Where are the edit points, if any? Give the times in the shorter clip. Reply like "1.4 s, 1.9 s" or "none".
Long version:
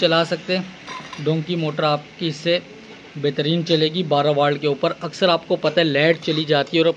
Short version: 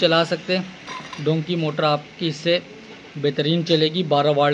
none

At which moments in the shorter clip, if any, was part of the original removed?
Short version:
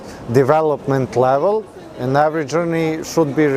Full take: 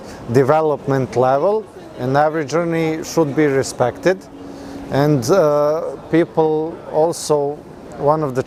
none

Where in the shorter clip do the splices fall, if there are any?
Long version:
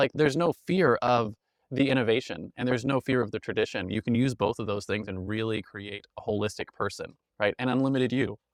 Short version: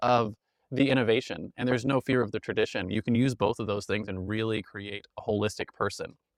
none

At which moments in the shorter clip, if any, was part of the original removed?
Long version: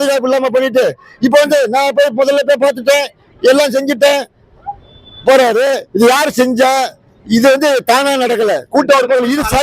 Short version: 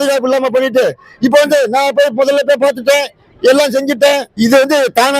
4.3 s

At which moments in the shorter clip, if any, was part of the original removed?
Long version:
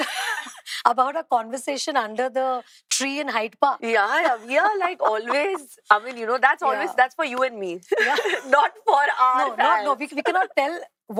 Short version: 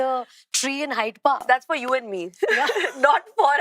1.4 s

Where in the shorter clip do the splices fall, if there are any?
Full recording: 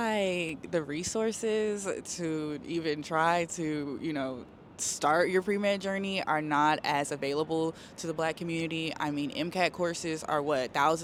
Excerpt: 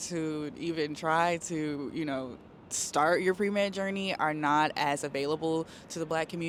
none

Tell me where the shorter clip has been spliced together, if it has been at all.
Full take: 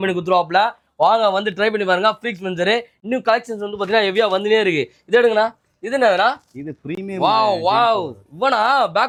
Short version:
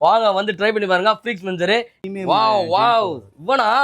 2.0 s

